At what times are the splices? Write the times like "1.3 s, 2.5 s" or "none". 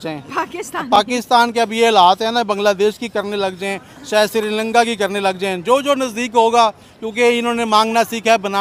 none